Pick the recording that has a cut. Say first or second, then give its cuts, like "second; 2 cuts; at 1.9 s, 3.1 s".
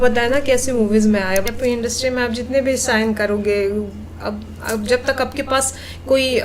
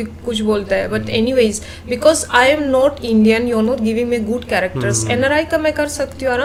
first; 1 cut; at 1.5 s